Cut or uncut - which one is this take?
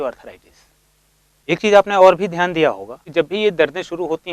cut